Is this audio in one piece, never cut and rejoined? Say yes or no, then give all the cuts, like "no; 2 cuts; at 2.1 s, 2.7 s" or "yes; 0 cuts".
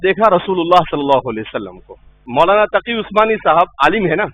no; 1 cut; at 2.2 s